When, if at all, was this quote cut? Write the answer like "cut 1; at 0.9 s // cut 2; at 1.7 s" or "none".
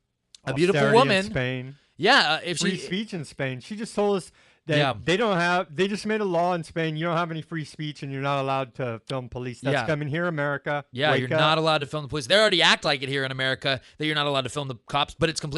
cut 1; at 12.1 s